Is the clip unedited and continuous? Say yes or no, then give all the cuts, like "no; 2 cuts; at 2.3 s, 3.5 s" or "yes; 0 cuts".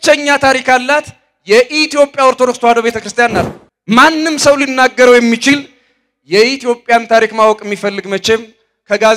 no; 1 cut; at 3.5 s